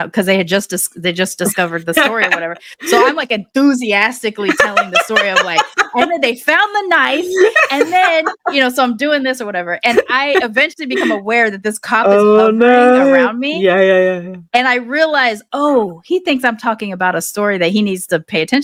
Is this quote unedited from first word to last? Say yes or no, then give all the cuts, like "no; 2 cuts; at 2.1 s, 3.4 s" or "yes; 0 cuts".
yes; 0 cuts